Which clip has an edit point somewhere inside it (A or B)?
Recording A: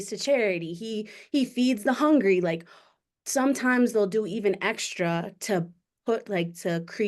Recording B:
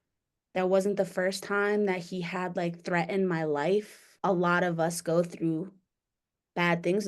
B